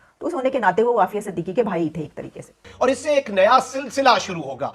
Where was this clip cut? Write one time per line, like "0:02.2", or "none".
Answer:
0:02.6